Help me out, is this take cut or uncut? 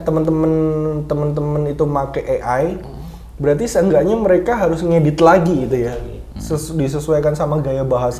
uncut